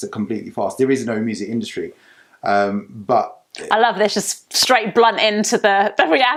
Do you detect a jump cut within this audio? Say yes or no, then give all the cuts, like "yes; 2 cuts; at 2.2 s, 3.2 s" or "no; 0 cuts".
no; 0 cuts